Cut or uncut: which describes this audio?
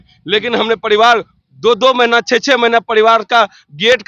uncut